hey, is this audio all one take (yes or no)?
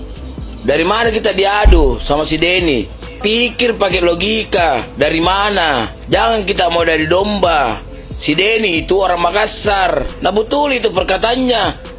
no